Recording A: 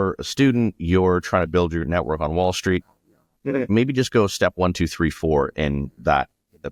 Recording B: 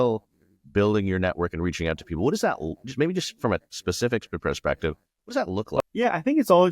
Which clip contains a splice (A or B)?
B